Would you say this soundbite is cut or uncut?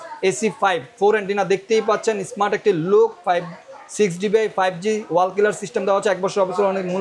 uncut